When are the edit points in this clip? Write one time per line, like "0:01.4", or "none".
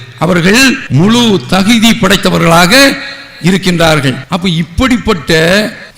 0:00.8
0:04.3